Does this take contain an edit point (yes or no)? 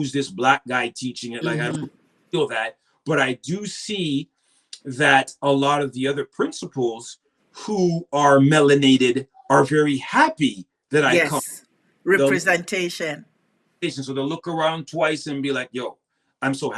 no